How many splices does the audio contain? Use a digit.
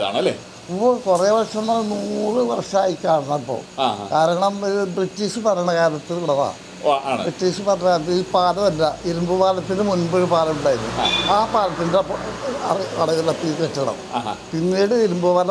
0